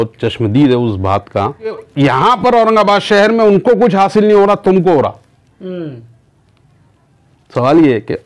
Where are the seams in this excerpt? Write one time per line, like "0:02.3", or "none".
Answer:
0:01.8